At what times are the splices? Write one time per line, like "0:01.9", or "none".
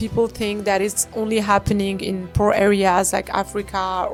none